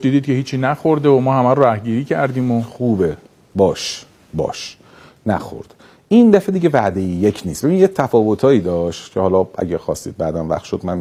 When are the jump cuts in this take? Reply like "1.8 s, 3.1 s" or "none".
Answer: none